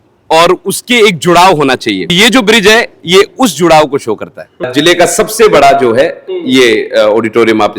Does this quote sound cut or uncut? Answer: cut